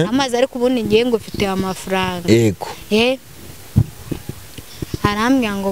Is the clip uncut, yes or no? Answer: yes